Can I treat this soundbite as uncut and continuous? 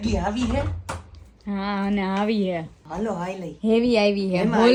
yes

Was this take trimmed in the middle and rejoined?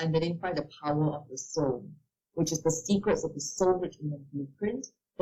no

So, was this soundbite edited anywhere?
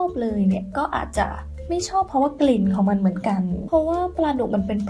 yes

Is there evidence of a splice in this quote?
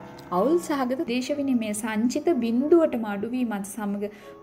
yes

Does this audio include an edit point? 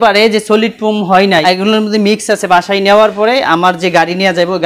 yes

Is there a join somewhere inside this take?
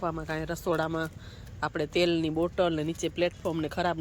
no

